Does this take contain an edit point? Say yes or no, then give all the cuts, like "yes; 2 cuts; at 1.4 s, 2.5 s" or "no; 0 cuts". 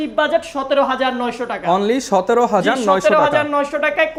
no; 0 cuts